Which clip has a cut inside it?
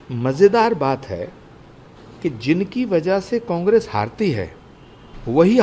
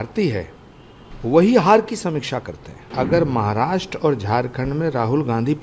second; 1 cut; at 2.9 s

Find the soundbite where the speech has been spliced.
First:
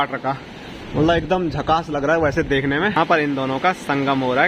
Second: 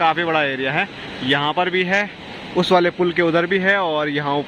first; 1 cut; at 2.9 s

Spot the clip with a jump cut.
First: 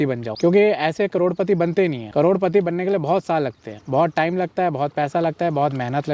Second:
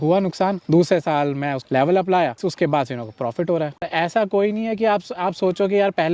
second; 2 cuts; at 2.4 s, 3.9 s

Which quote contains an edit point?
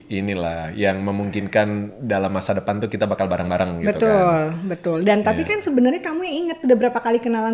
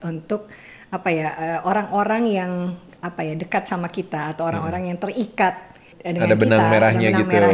second; 1 cut; at 5.9 s

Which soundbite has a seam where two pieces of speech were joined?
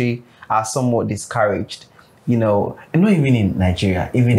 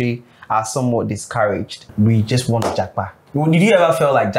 second; 2 cuts; at 1.9 s, 3.2 s

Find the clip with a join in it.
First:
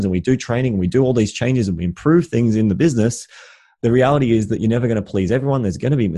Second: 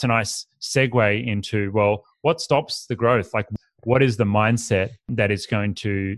second; 2 cuts; at 3.4 s, 5.1 s

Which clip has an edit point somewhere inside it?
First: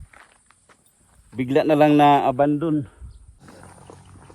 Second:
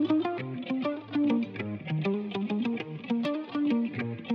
first; 1 cut; at 3.4 s

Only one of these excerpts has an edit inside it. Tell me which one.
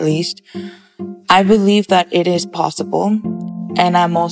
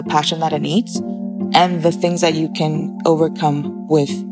first; 1 cut; at 3.3 s

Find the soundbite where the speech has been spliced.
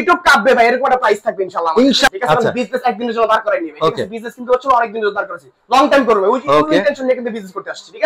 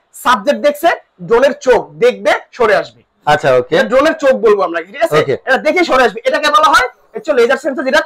first; 1 cut; at 2.1 s

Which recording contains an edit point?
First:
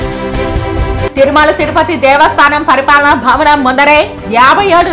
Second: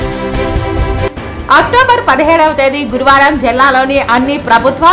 first; 1 cut; at 1.0 s

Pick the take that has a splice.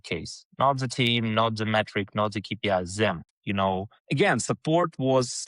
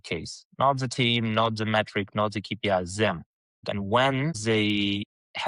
first; 1 cut; at 3.3 s

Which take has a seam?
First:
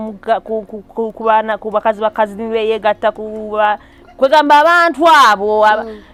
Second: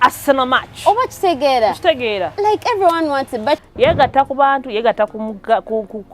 second; 1 cut; at 3.6 s

